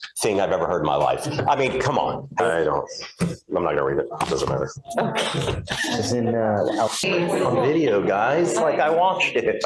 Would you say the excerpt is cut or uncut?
cut